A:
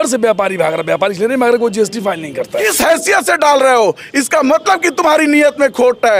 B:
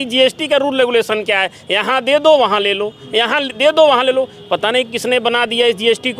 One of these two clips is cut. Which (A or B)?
A